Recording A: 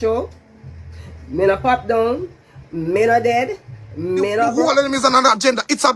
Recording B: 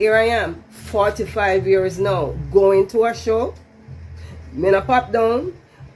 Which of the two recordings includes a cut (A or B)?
A